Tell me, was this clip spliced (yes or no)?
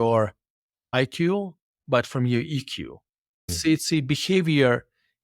yes